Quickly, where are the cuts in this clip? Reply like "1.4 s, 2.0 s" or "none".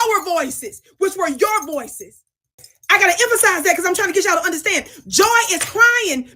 2.7 s